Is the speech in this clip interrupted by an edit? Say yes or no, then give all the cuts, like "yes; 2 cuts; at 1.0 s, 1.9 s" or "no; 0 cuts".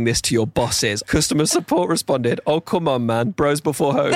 yes; 1 cut; at 1.2 s